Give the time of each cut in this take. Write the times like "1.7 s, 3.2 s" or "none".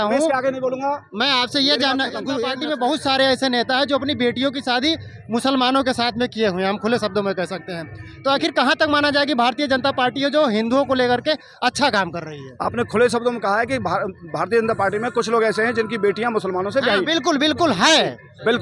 2.5 s